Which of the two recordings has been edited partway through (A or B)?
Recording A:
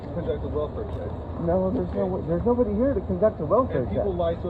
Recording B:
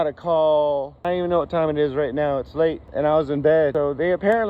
B